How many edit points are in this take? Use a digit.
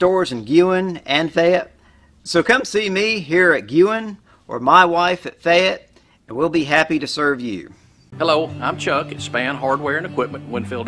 0